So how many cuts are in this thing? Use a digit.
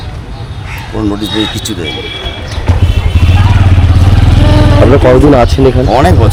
0